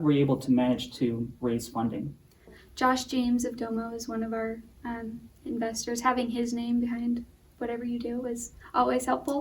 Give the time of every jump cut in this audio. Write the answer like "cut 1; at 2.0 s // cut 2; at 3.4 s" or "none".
cut 1; at 2.6 s